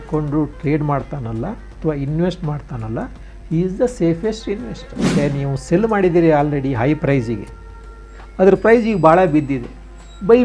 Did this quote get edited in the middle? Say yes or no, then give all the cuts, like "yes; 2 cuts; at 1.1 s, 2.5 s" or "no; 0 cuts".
yes; 1 cut; at 5.1 s